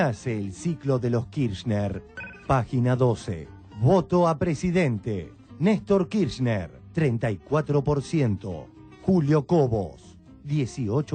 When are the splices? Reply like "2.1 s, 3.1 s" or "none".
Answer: none